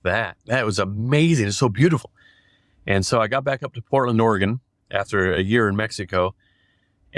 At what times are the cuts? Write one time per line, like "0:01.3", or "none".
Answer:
none